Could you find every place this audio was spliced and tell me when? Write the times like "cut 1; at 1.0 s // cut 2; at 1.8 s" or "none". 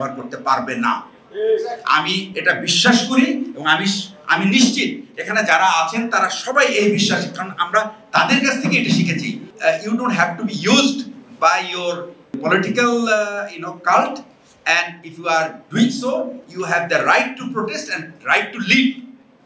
cut 1; at 9.5 s // cut 2; at 12.4 s